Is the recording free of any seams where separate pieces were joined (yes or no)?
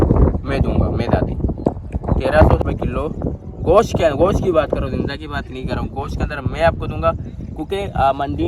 yes